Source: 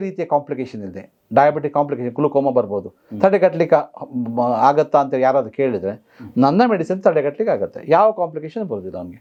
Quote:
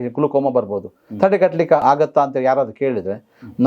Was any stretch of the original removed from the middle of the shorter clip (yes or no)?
yes